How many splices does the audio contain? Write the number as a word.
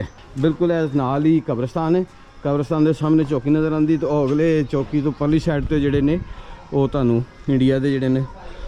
zero